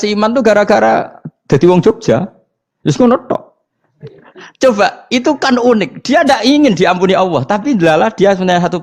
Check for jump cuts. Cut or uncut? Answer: cut